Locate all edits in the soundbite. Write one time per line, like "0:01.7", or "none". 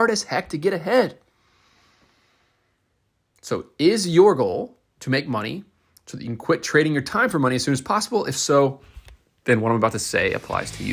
none

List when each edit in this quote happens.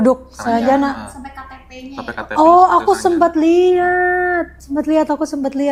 none

